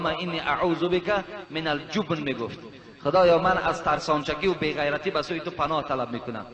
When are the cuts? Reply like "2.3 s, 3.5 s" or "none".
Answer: none